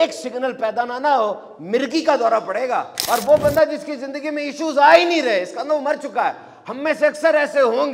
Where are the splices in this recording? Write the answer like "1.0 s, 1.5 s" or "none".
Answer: 2.9 s